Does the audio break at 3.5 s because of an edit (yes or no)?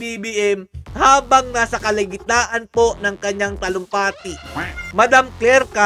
no